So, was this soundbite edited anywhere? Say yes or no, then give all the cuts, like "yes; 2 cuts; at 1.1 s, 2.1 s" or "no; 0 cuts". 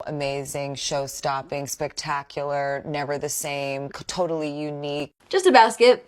no; 0 cuts